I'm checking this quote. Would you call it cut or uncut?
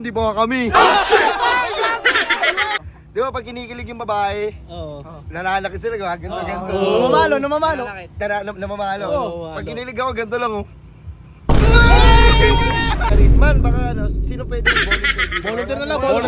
cut